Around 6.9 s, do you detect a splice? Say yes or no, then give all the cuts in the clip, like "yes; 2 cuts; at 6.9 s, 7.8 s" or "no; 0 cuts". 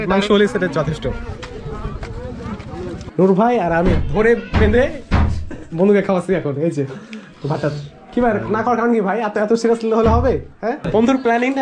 no; 2 cuts; at 3.0 s, 10.8 s